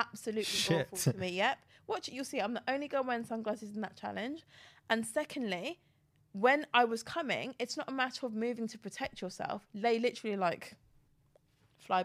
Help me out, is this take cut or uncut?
uncut